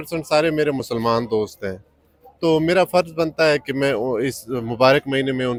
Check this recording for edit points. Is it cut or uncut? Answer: uncut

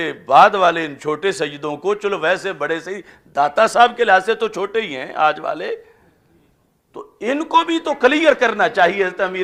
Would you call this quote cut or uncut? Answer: uncut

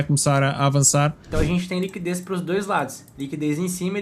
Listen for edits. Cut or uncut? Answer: cut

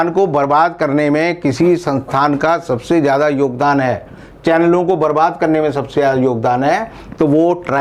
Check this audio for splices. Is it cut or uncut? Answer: uncut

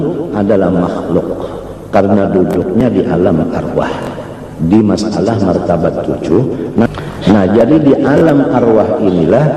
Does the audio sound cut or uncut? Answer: cut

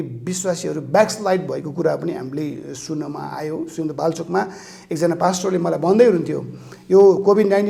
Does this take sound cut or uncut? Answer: uncut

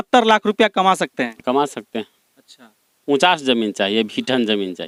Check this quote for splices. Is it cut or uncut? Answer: uncut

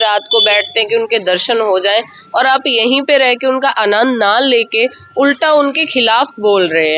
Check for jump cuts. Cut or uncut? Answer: uncut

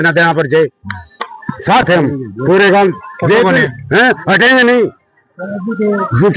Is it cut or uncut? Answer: uncut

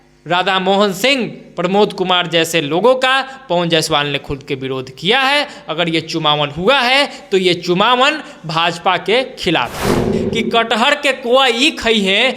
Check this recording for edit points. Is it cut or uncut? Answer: cut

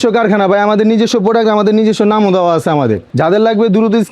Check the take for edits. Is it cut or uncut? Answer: cut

